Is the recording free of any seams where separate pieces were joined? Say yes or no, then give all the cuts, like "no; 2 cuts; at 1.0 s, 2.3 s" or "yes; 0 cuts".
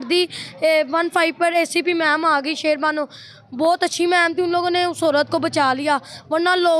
yes; 0 cuts